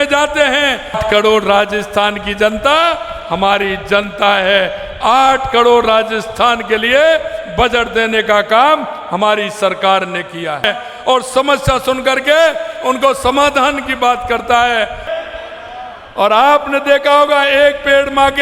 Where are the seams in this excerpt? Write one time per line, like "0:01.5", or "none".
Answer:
0:01.0
0:10.6
0:15.0